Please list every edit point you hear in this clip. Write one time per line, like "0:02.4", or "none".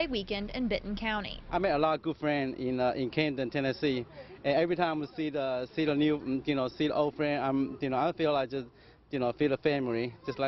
0:02.8